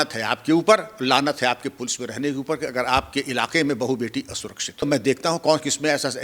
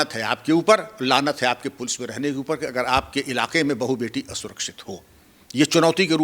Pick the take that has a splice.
first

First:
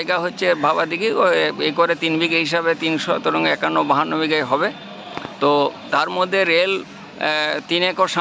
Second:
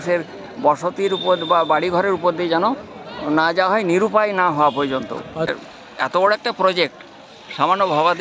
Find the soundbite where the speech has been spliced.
second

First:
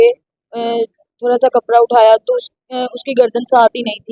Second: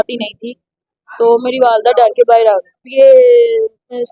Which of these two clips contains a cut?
second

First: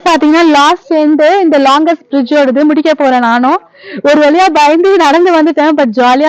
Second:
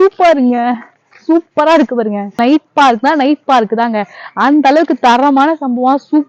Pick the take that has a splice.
second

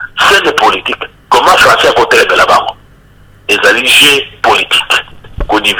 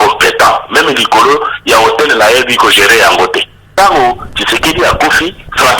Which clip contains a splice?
second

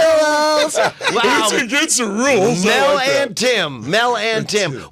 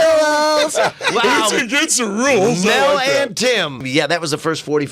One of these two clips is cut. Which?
second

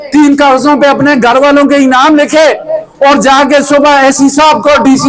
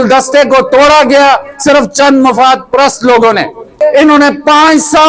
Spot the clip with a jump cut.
second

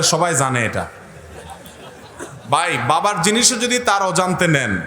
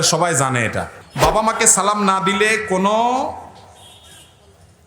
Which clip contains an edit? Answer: second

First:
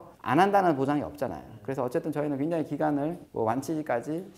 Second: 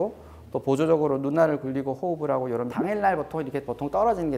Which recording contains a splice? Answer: second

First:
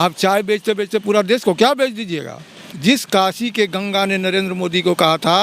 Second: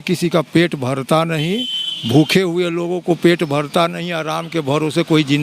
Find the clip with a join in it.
first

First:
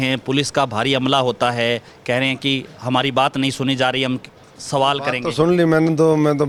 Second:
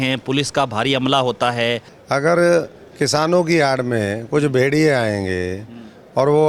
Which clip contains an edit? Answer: second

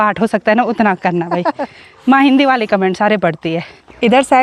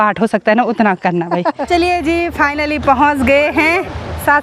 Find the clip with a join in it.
second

